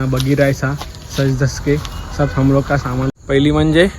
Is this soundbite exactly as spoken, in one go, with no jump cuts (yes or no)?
no